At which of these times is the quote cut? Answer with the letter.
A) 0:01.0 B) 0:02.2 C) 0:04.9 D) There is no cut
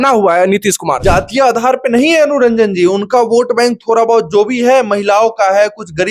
A